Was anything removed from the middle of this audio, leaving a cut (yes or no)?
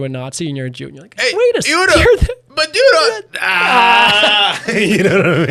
no